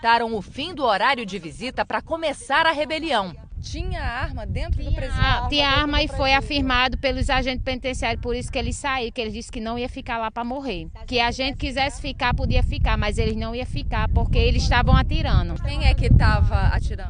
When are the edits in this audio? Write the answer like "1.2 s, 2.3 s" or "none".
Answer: 4.7 s